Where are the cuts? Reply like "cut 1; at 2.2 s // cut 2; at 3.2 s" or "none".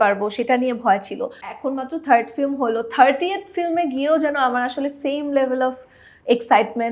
cut 1; at 1.4 s